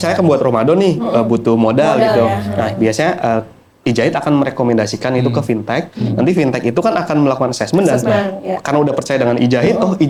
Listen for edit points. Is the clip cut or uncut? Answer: uncut